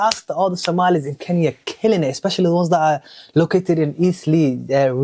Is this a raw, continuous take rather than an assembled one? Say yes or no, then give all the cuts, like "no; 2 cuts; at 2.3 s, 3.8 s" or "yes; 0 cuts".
yes; 0 cuts